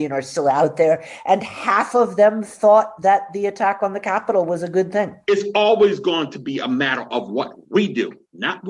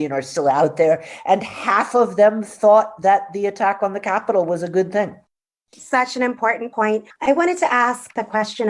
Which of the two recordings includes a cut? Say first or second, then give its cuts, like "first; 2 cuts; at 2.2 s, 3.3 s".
first; 1 cut; at 5.2 s